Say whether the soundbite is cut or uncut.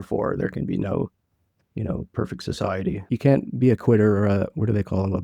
cut